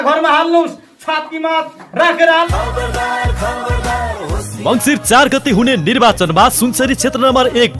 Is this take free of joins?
no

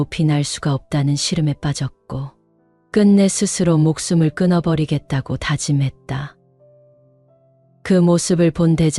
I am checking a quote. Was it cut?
no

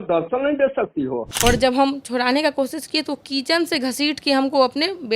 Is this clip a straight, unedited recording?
no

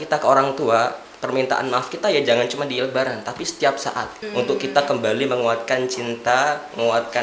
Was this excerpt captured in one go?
no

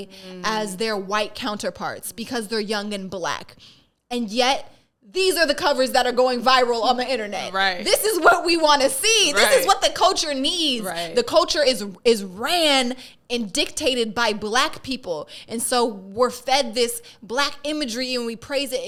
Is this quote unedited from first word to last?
yes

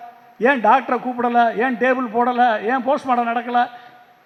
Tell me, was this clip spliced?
no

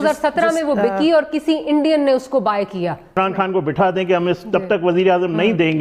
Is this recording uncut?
no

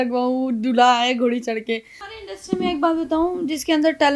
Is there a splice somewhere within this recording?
yes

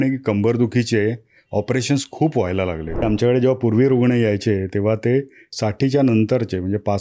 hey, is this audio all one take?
no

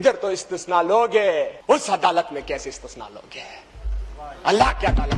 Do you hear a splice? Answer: yes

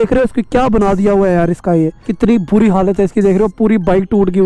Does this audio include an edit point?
yes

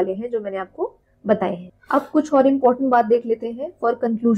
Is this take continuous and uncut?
yes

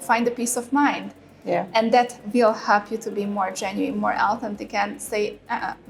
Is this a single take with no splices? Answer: yes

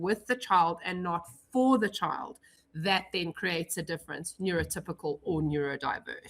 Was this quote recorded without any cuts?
yes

